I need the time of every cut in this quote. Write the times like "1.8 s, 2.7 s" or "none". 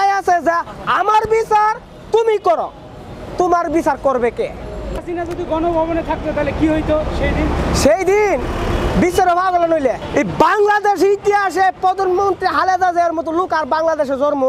5.0 s, 10.0 s